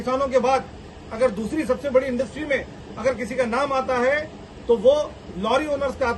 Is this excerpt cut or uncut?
uncut